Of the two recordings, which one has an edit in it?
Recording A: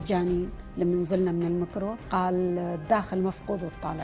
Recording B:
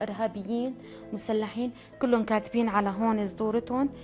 A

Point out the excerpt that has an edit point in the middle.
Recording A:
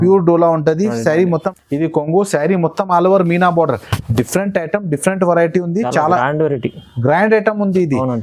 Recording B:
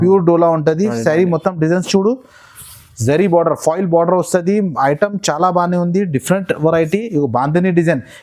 A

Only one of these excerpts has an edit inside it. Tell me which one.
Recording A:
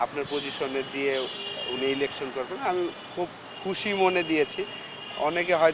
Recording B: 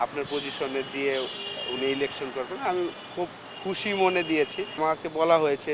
B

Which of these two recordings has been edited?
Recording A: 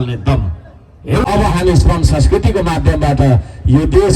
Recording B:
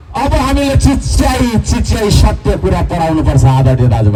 A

